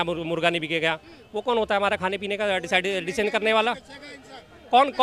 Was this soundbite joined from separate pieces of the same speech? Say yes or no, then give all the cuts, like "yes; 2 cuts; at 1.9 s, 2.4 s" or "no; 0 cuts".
no; 0 cuts